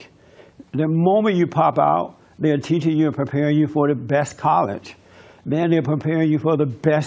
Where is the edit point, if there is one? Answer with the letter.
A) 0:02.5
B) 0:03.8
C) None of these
B